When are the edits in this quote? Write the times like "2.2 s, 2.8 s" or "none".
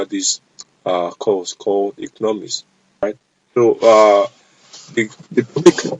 3.0 s